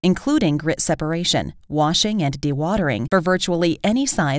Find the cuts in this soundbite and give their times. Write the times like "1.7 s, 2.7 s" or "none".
none

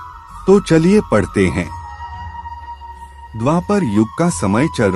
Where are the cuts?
1.8 s, 3.3 s

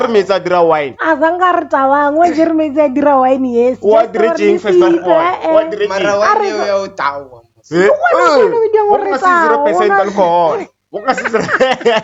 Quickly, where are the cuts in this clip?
none

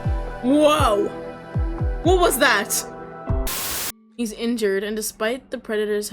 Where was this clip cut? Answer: 3.5 s

